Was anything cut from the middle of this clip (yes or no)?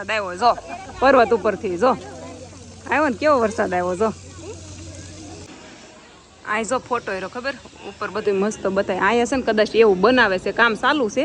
no